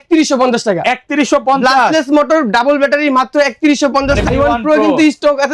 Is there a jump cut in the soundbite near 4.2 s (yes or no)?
yes